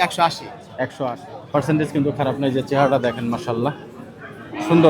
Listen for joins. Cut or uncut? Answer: cut